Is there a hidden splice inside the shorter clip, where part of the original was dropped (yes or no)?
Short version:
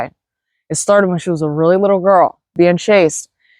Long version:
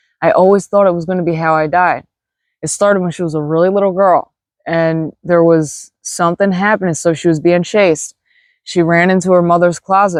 yes